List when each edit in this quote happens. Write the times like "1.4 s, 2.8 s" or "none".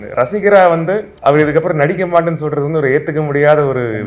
1.1 s